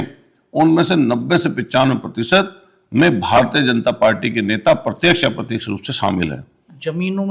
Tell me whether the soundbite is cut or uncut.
uncut